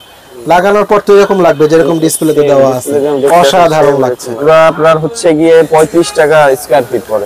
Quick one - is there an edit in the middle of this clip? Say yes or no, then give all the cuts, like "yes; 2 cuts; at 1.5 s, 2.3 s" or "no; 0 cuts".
yes; 1 cut; at 4.4 s